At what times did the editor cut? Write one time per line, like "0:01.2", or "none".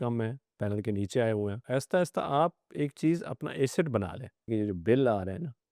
0:01.6
0:04.5